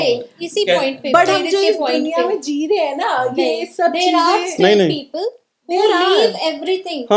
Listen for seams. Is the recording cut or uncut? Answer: uncut